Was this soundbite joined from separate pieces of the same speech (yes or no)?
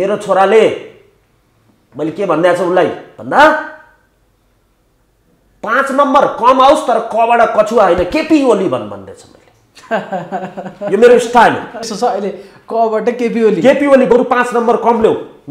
yes